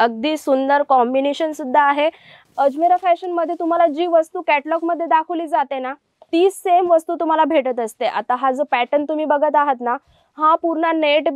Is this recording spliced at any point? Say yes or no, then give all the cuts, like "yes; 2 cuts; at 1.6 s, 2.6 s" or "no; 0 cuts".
yes; 1 cut; at 2.3 s